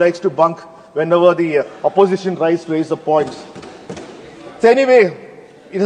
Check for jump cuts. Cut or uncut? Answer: uncut